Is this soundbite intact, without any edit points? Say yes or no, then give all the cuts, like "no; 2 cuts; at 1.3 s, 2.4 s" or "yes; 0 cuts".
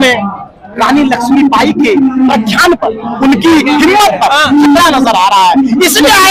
yes; 0 cuts